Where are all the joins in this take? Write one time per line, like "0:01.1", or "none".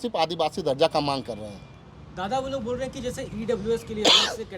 none